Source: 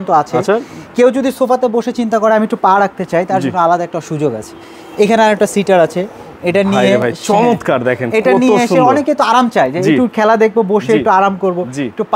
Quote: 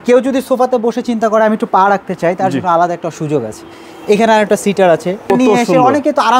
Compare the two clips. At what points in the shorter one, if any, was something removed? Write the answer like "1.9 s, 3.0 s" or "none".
5.3 s